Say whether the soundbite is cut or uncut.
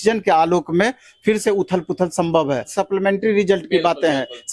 cut